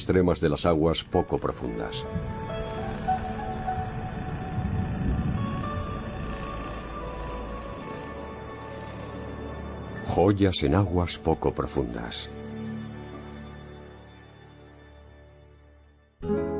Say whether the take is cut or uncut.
cut